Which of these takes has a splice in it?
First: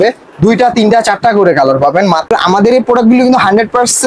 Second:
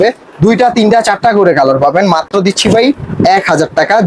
first; 1 cut; at 2.3 s

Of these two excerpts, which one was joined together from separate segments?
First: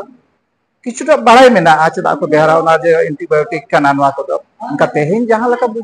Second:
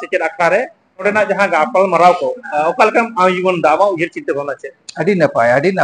second; 1 cut; at 1.0 s

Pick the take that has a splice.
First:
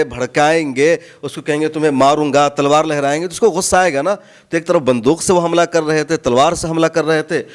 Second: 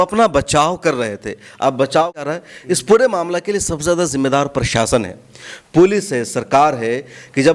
second; 1 cut; at 2.2 s

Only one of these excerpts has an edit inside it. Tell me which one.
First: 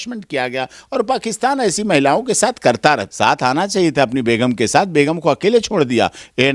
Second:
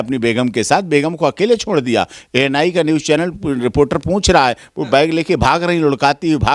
first; 1 cut; at 3.1 s

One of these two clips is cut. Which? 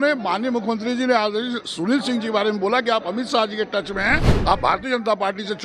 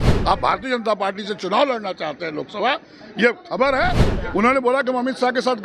second; 1 cut; at 4.1 s

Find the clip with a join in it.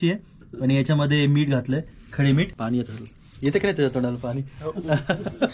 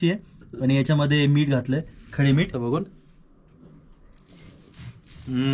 second; 1 cut; at 2.5 s

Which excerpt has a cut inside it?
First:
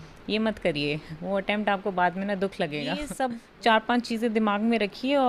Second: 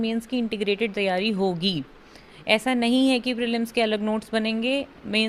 first; 1 cut; at 3.1 s

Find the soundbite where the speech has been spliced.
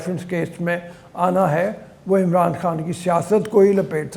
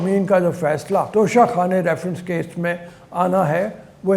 second; 1 cut; at 1.1 s

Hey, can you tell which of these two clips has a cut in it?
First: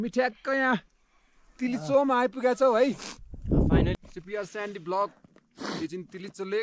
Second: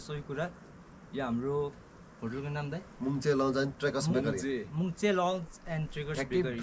first; 1 cut; at 3.9 s

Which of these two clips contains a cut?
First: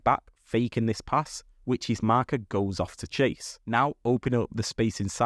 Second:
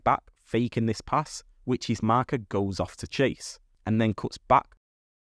first; 1 cut; at 3.5 s

